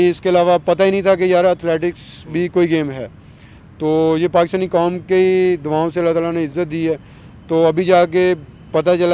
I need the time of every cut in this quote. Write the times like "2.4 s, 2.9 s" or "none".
none